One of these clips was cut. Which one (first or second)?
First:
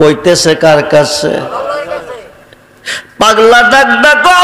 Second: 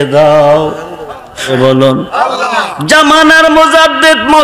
second